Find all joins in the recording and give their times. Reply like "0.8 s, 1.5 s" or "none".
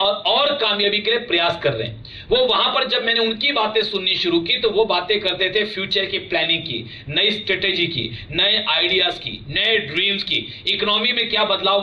none